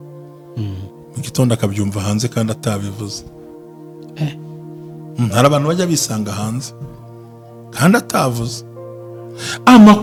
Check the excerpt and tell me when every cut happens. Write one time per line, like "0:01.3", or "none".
none